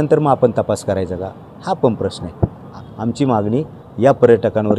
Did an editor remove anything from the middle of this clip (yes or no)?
yes